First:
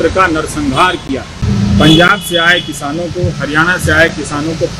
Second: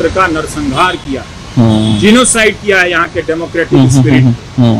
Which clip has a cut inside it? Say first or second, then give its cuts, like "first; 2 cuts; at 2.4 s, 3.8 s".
first; 1 cut; at 1.5 s